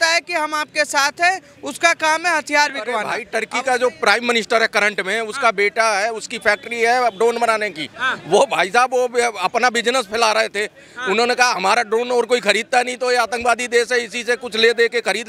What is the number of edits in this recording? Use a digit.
1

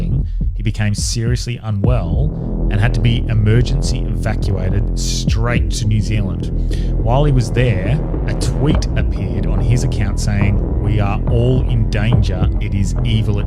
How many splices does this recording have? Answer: 0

